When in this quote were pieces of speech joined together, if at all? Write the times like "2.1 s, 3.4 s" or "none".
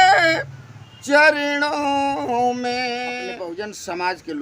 3.3 s